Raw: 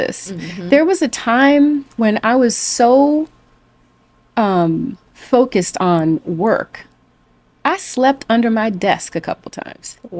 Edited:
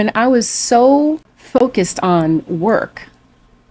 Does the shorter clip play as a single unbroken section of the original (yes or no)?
no